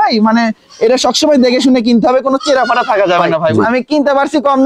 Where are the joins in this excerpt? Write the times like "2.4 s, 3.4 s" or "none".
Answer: 3.6 s